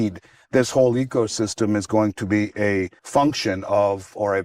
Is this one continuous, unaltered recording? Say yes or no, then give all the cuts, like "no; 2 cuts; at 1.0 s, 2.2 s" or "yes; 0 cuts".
no; 1 cut; at 3.0 s